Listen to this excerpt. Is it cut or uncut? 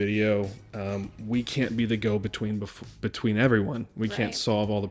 uncut